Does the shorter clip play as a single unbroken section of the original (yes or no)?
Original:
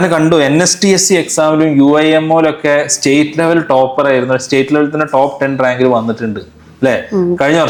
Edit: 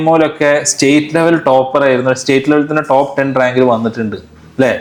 yes